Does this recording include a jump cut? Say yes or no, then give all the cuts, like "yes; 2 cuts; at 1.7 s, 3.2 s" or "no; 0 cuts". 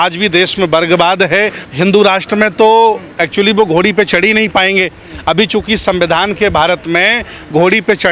yes; 1 cut; at 1.6 s